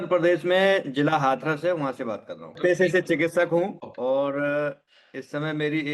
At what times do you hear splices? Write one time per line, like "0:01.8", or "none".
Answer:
0:02.5
0:03.8